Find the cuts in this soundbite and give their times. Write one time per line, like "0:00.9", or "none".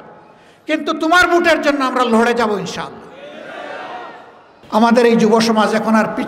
0:04.5

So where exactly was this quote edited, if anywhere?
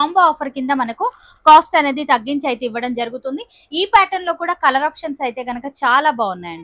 none

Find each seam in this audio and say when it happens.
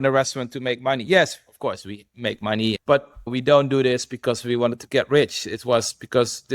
0:02.8

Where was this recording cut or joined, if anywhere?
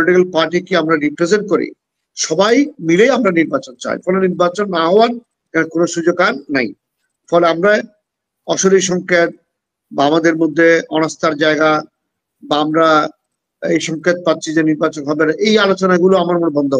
none

